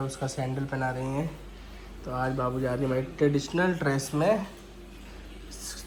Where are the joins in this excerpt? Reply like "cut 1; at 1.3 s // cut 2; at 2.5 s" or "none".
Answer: none

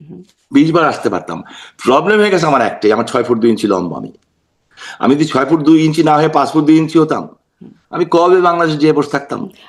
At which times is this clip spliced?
none

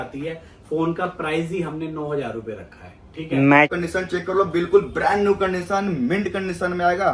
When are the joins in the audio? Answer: cut 1; at 3.7 s

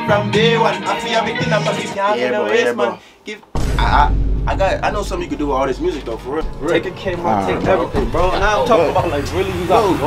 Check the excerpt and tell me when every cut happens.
cut 1; at 6.5 s

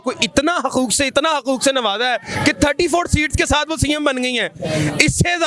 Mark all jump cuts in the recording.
none

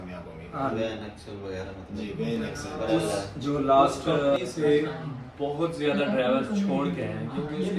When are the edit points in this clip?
cut 1; at 2.6 s // cut 2; at 3.3 s // cut 3; at 4.4 s

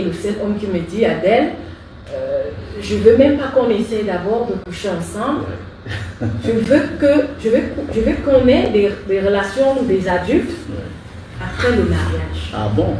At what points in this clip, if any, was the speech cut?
none

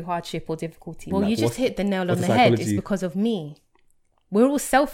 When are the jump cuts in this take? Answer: cut 1; at 1.0 s

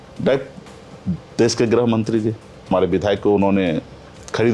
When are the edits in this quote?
cut 1; at 2.7 s

